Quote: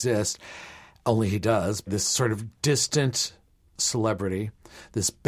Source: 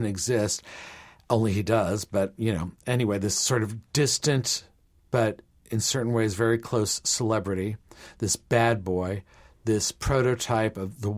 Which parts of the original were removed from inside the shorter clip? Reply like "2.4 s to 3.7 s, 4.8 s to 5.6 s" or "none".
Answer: 2.1 s to 3.2 s, 5.0 s to 7.0 s

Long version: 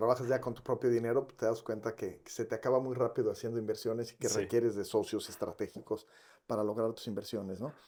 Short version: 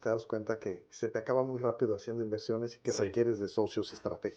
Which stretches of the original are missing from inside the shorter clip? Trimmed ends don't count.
none

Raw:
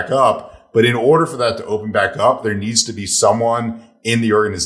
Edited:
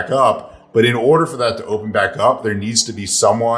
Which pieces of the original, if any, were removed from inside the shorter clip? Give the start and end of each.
none

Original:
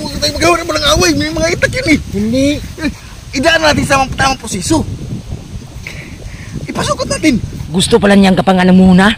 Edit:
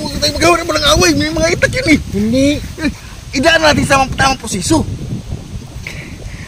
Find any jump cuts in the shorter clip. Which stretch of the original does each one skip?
none

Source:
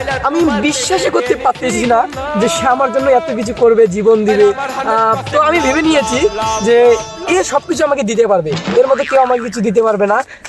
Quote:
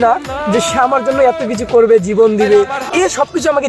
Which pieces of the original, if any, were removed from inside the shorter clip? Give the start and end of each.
4.7 s to 7.1 s

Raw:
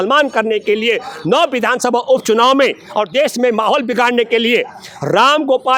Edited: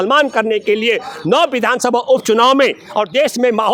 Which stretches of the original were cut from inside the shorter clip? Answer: none

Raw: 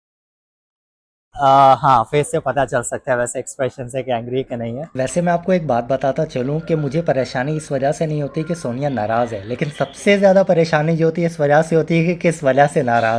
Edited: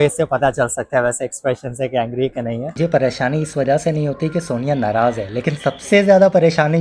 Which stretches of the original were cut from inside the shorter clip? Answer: 4.9 s to 6.9 s

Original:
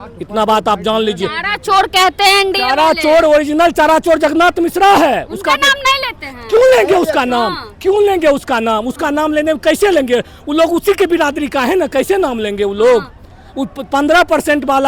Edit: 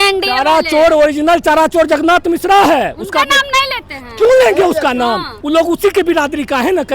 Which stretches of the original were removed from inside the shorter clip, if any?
7.7 s to 10.4 s

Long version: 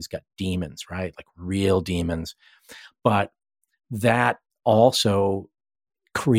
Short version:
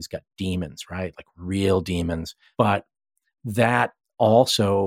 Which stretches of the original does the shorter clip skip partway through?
2.4 s to 2.8 s

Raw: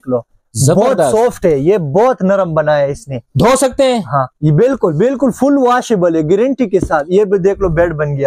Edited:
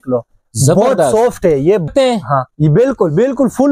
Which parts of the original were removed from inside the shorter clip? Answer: 1.9 s to 3.7 s

